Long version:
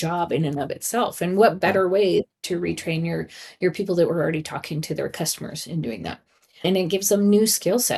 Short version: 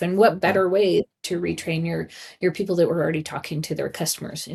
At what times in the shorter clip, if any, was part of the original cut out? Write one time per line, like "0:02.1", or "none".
none